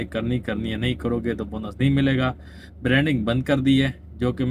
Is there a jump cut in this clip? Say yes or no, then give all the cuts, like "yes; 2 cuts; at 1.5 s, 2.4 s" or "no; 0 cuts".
no; 0 cuts